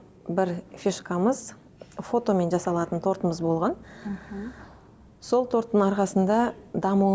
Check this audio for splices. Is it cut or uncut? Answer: uncut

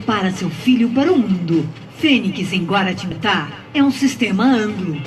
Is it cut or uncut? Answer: cut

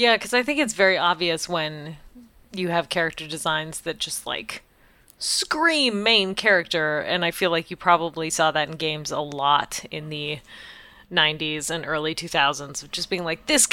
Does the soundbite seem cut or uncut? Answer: uncut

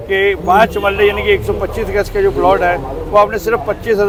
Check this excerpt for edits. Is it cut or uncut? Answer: uncut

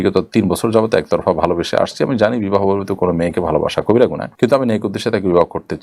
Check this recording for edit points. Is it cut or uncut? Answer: uncut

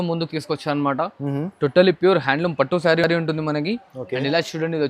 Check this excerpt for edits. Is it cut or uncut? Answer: uncut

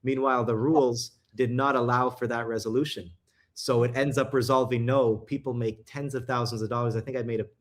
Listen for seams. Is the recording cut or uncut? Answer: uncut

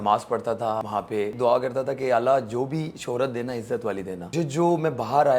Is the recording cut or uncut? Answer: cut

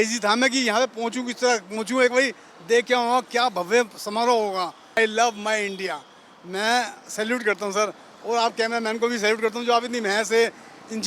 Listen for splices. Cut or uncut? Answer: cut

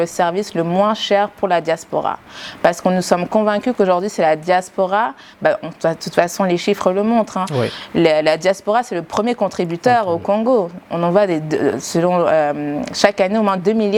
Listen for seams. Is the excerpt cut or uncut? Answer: uncut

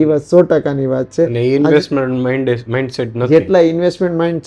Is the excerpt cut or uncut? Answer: uncut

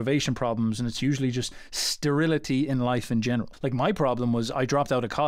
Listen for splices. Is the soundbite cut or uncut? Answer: cut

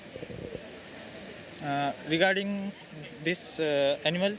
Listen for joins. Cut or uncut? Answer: uncut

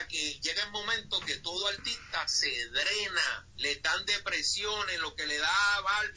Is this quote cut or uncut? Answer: cut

